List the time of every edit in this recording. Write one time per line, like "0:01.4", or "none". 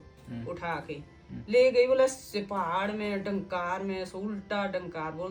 none